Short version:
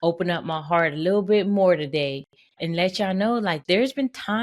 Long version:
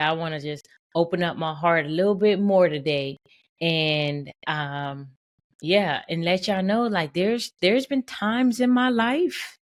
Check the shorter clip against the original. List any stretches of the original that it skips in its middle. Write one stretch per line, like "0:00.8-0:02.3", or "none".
0:03.5-0:06.0
0:07.1-0:07.5